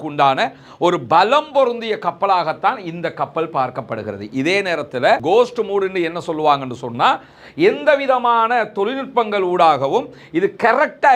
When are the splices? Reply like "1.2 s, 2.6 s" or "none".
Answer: 5.2 s